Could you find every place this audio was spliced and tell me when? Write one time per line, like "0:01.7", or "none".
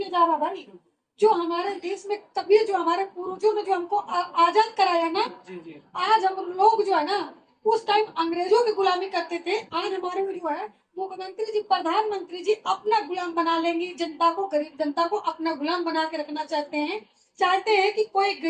none